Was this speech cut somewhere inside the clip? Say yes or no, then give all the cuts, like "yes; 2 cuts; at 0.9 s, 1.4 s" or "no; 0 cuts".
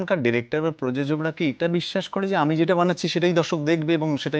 no; 0 cuts